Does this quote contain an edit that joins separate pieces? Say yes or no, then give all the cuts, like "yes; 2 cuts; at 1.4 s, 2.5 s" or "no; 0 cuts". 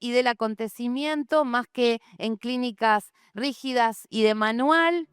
yes; 1 cut; at 4.1 s